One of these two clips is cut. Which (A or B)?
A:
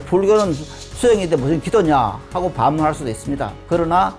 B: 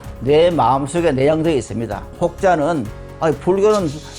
B